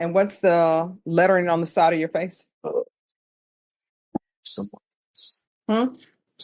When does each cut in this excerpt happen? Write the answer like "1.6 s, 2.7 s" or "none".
2.5 s